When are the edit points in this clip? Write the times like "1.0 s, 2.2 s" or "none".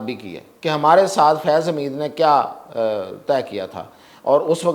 none